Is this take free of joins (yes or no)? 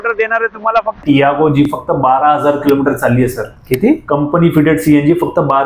no